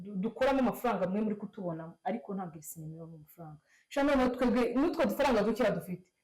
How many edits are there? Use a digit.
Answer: 0